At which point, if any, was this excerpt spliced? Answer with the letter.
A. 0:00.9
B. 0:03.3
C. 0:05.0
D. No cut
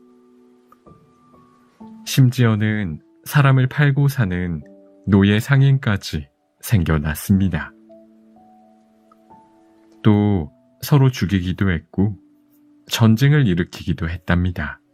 D